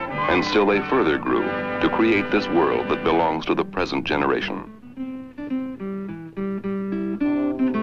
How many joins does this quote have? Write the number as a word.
one